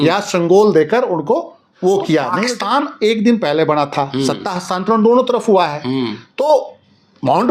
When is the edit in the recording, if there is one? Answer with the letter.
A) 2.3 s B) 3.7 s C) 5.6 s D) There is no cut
A